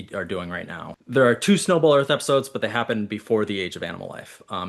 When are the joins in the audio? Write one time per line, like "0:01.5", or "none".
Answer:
0:00.9